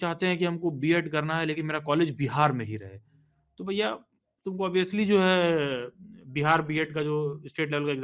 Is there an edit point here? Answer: no; 0 cuts

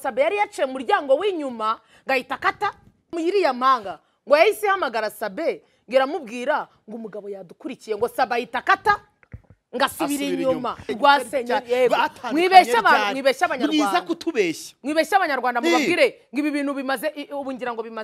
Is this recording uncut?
no; 2 cuts; at 3.2 s, 10.9 s

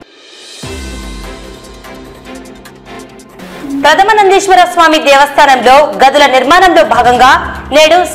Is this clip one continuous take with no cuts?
yes; 0 cuts

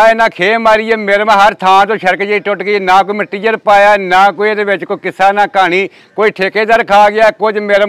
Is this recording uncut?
yes; 0 cuts

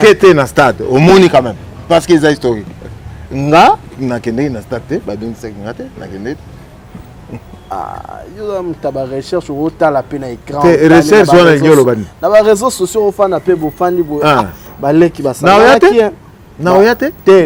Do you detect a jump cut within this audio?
no; 0 cuts

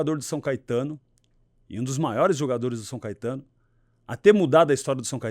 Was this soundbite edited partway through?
no; 0 cuts

